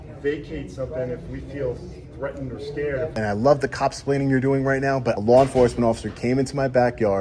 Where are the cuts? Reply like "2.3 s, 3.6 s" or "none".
3.1 s, 5.2 s

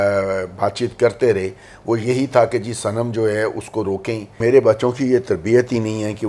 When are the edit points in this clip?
4.4 s

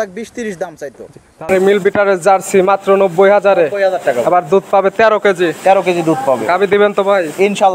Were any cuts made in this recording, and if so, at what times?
1.5 s

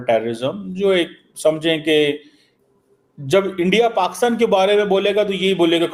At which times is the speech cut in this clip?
none

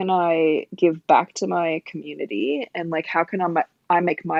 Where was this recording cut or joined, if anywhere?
none

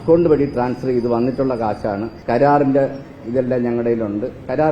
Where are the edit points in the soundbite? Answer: 2.1 s

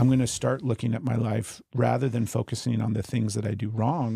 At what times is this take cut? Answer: none

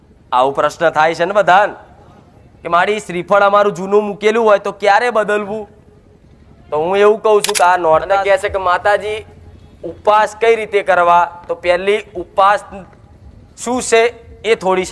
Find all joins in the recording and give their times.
8.0 s

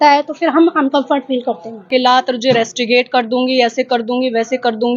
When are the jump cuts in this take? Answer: 1.9 s

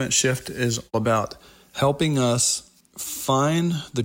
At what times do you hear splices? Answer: 0.9 s

